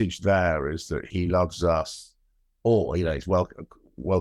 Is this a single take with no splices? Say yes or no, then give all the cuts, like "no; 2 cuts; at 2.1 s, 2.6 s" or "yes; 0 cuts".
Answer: no; 1 cut; at 1.1 s